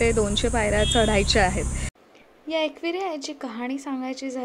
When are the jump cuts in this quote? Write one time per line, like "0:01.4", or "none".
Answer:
0:02.1